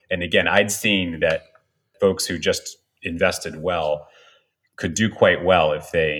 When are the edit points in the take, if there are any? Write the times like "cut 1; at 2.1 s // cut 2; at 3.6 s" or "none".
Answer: cut 1; at 1.9 s